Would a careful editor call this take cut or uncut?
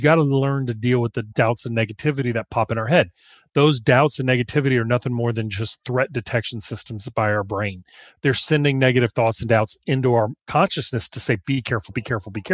uncut